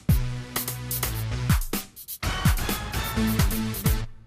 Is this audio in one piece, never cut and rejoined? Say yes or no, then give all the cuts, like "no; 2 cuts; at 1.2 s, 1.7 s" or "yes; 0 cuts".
no; 1 cut; at 2.0 s